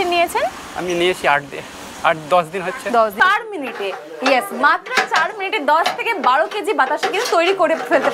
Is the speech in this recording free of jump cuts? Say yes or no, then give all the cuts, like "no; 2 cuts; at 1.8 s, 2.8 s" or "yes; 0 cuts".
no; 1 cut; at 3.2 s